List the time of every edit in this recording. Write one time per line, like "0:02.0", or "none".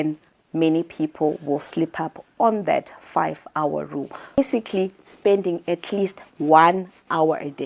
0:04.4